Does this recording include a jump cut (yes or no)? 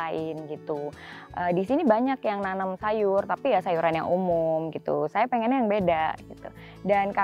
no